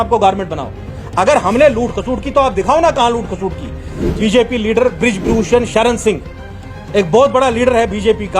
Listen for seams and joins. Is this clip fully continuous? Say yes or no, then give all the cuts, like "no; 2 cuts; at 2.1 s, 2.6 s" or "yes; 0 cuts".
no; 1 cut; at 4.0 s